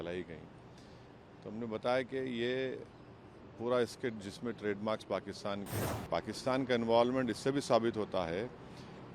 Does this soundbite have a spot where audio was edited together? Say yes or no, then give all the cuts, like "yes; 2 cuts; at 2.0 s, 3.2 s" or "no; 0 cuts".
yes; 1 cut; at 5.8 s